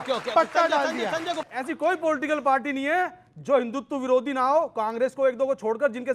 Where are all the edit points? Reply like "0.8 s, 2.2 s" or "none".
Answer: 1.5 s